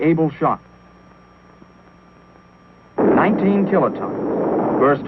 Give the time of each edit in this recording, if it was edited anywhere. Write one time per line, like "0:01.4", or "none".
none